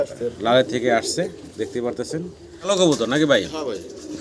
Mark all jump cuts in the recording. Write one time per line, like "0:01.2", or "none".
0:02.5